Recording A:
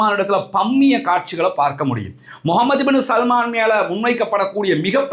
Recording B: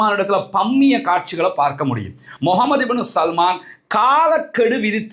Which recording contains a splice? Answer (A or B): B